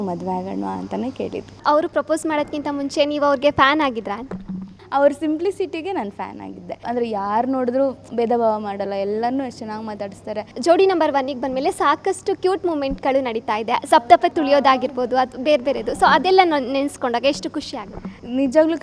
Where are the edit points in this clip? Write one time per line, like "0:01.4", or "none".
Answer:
0:01.6
0:04.8
0:06.8
0:10.6
0:14.3